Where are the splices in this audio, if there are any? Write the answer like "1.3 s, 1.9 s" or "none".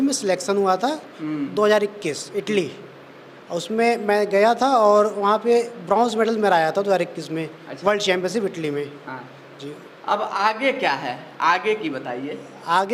none